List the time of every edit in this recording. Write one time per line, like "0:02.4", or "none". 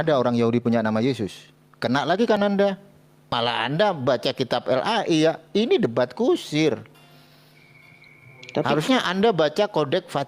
0:03.3